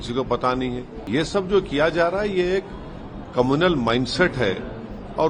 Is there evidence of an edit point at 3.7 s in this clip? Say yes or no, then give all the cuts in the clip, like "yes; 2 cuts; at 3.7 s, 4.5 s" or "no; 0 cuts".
no; 1 cut; at 1.1 s